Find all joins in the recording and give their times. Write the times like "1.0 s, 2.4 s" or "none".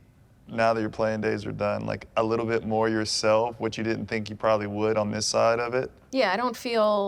6.0 s